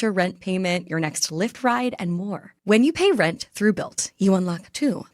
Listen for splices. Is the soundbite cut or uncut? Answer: uncut